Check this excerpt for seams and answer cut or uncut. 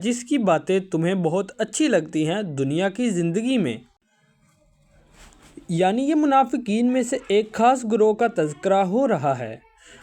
uncut